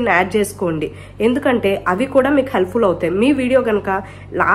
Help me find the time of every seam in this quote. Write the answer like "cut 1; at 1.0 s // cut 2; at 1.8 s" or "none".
none